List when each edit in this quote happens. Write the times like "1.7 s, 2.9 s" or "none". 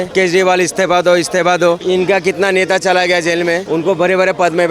none